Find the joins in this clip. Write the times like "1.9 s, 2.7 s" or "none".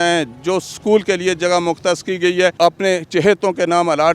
2.5 s